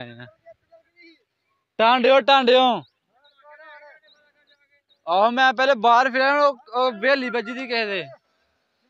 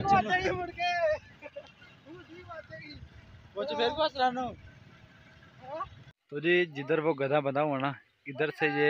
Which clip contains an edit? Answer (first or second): second